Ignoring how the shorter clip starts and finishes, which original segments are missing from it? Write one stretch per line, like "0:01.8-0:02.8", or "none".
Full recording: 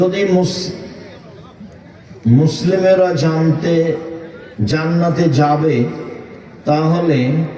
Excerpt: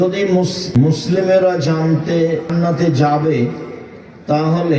0:01.0-0:02.6
0:04.0-0:04.9